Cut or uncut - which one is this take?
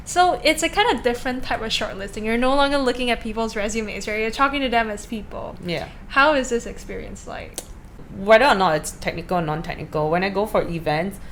uncut